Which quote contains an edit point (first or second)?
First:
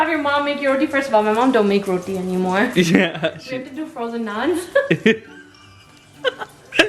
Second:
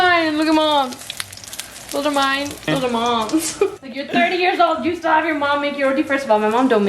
second